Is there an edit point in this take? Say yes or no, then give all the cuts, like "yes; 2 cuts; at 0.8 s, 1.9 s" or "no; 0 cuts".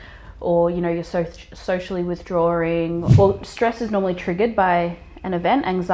yes; 1 cut; at 3.1 s